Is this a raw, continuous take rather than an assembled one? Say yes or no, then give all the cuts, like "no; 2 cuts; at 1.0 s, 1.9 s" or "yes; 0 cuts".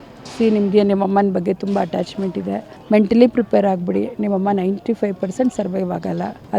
yes; 0 cuts